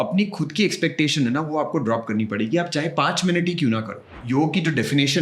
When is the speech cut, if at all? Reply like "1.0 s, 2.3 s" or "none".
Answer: 4.2 s